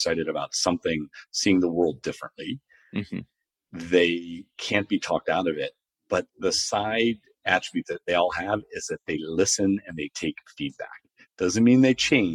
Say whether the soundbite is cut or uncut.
cut